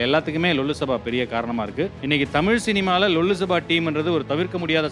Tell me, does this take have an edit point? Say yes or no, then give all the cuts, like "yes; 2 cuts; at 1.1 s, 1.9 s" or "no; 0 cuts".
yes; 1 cut; at 2.0 s